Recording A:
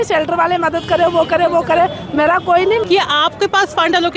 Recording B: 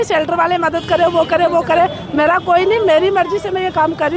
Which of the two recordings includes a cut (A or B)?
A